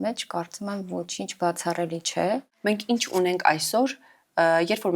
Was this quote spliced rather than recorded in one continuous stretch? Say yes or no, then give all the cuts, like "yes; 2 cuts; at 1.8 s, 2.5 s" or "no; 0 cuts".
yes; 1 cut; at 2.5 s